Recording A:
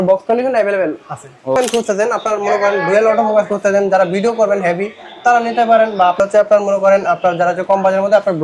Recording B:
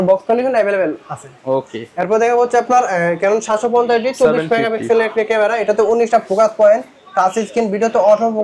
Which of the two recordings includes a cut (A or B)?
A